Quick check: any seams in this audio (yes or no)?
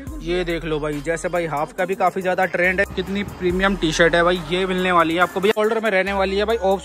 yes